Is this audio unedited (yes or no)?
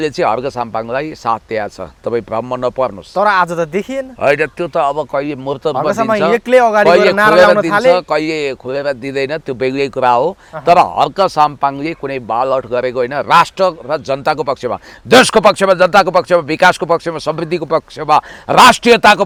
yes